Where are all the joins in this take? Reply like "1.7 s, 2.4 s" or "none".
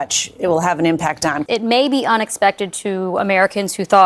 1.4 s